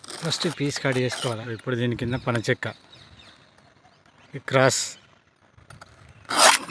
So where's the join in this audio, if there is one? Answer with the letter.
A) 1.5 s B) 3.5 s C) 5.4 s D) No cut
A